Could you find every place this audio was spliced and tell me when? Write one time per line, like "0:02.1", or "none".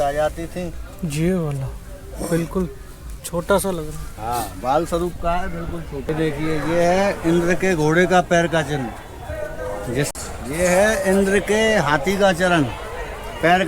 0:06.1
0:10.1